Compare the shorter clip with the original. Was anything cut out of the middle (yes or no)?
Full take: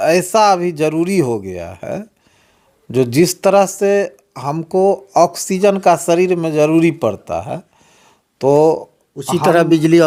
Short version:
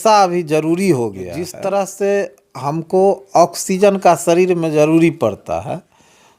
yes